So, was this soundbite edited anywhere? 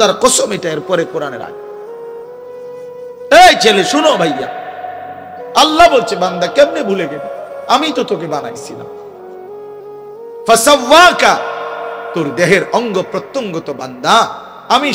yes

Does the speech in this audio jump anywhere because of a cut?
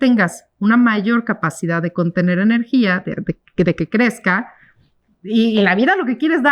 no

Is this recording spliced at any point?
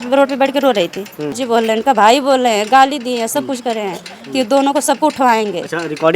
yes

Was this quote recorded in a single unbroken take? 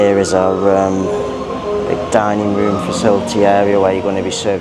yes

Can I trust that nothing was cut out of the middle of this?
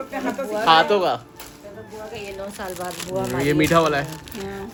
yes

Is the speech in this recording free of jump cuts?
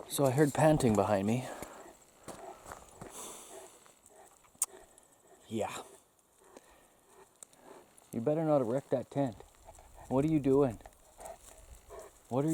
yes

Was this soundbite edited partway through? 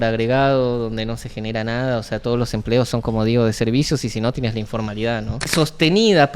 yes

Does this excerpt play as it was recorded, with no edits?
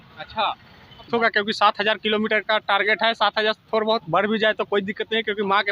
no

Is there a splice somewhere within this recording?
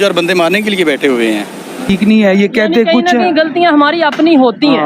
yes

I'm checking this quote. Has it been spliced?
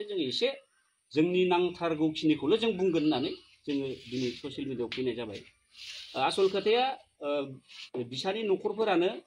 no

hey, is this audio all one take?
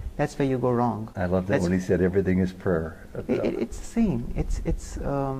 yes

